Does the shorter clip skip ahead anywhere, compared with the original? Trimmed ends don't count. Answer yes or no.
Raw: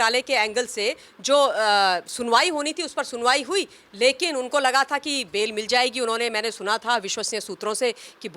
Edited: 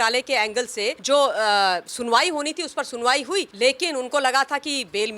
yes